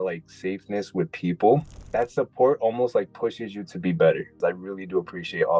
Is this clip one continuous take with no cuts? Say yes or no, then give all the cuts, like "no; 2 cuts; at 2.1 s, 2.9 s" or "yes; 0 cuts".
no; 2 cuts; at 1.8 s, 4.4 s